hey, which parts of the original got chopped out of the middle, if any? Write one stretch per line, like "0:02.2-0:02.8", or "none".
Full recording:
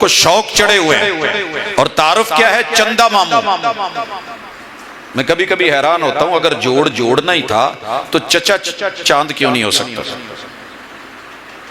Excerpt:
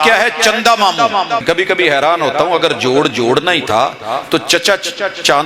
0:03.8-0:05.2